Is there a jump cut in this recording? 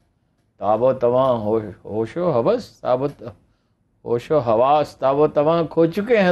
no; 0 cuts

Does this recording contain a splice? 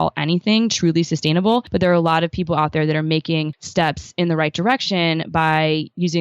yes; 2 cuts; at 1.7 s, 3.6 s

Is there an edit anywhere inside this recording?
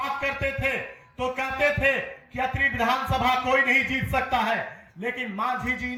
no; 0 cuts

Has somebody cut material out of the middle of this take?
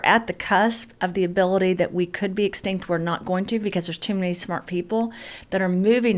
no; 0 cuts

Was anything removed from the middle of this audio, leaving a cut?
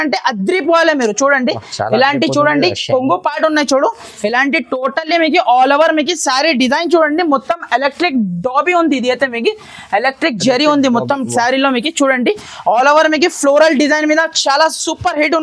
no; 0 cuts

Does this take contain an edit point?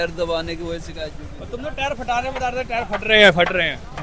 no; 0 cuts

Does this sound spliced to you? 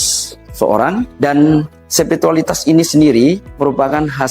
yes; 3 cuts; at 1.1 s, 1.8 s, 3.5 s

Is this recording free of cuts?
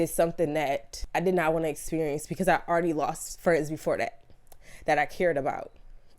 no; 1 cut; at 0.9 s

